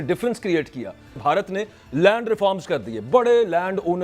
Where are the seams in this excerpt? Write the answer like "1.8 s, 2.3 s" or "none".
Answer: 1.2 s

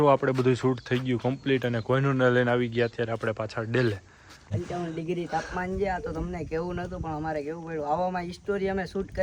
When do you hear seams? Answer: 4.5 s

